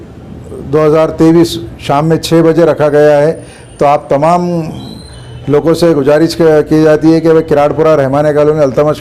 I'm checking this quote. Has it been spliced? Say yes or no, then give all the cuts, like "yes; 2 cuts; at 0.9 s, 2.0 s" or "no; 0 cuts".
no; 0 cuts